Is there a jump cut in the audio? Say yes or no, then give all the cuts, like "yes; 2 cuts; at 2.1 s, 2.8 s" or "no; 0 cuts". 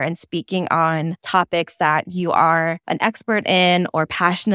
yes; 2 cuts; at 1.2 s, 2.8 s